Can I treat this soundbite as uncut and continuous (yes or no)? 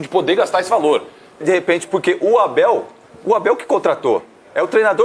no